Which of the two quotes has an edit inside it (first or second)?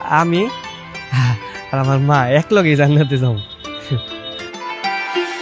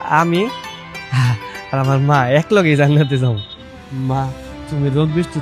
second